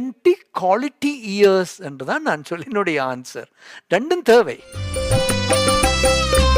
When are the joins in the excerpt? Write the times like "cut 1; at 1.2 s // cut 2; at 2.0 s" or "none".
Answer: cut 1; at 4.9 s